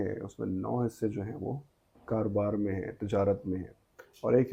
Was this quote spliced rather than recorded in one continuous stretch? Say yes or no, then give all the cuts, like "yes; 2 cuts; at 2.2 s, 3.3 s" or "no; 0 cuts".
no; 0 cuts